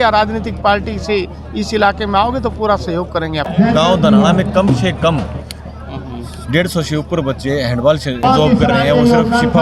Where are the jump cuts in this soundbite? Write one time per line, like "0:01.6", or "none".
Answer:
0:03.5
0:08.2